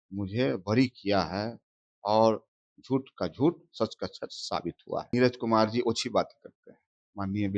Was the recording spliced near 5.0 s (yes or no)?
yes